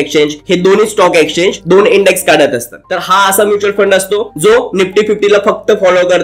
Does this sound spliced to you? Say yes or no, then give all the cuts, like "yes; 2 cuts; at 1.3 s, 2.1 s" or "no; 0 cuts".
yes; 1 cut; at 2.8 s